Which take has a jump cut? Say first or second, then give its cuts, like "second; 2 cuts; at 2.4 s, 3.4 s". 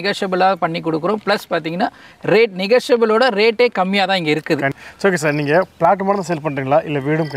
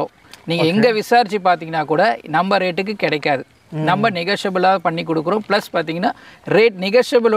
first; 1 cut; at 4.8 s